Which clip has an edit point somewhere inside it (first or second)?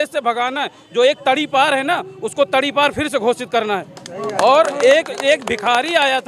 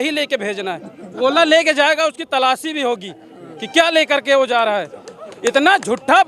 second